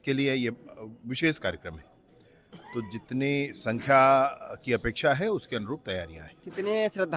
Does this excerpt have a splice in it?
no; 0 cuts

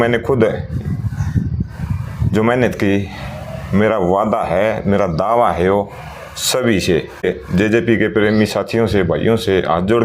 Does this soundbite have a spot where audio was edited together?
yes; 1 cut; at 7.2 s

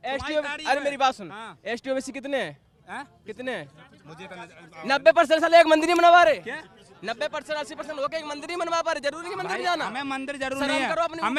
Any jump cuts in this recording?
no; 0 cuts

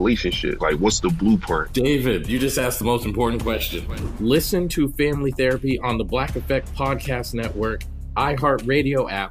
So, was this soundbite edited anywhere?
no; 0 cuts

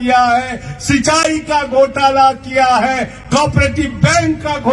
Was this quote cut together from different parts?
no; 0 cuts

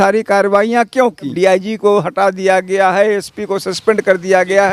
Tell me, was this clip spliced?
yes; 1 cut; at 1.3 s

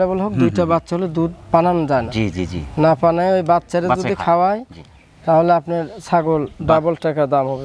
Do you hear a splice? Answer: no; 0 cuts

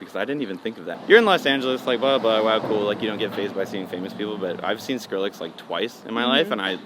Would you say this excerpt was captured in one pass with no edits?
no; 1 cut; at 1.0 s

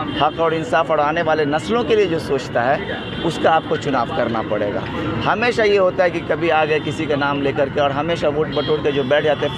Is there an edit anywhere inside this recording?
no; 0 cuts

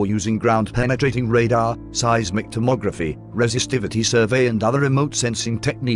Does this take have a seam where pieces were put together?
no; 0 cuts

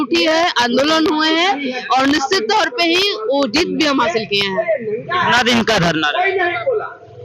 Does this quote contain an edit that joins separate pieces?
no; 0 cuts

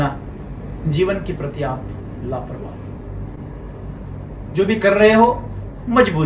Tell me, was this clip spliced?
no; 0 cuts

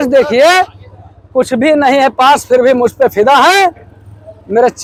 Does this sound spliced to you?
no; 0 cuts

